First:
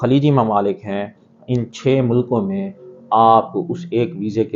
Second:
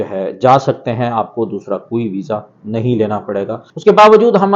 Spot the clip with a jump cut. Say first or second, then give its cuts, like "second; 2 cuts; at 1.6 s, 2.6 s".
second; 1 cut; at 3.6 s